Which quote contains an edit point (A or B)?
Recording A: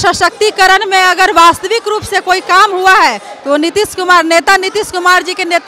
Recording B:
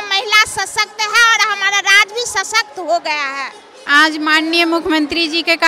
B